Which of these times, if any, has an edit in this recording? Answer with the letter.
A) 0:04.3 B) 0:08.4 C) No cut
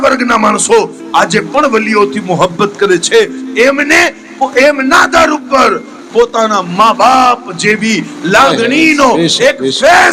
C